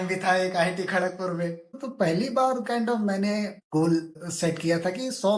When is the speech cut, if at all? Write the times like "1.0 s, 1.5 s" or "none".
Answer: 1.8 s, 3.6 s, 4.2 s